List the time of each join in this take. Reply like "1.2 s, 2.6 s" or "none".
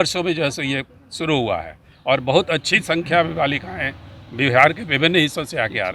none